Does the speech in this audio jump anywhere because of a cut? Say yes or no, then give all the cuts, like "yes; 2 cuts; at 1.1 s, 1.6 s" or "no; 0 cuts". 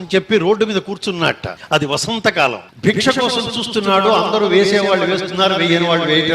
yes; 2 cuts; at 1.5 s, 2.7 s